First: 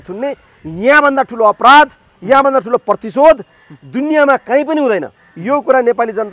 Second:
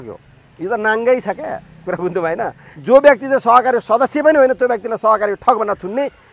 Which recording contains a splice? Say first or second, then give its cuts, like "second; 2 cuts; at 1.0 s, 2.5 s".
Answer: second; 1 cut; at 2.7 s